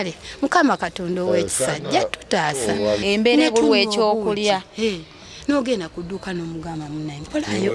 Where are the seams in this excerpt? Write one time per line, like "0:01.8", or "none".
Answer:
0:03.0